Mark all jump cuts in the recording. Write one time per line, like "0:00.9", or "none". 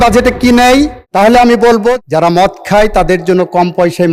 0:01.0
0:02.0